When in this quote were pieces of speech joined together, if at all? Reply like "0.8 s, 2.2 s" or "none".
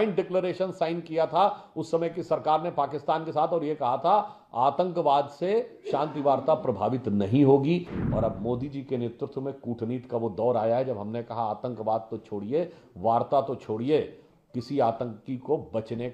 none